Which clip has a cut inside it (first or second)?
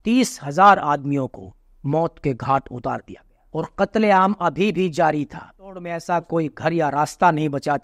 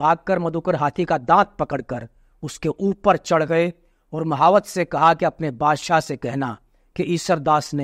first